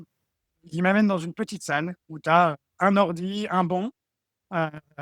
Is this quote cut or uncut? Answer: uncut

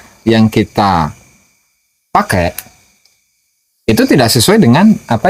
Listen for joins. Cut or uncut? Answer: uncut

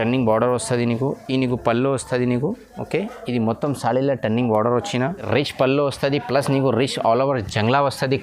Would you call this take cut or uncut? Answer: cut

